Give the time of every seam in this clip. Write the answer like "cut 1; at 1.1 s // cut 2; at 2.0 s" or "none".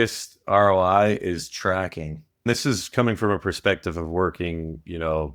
cut 1; at 2.5 s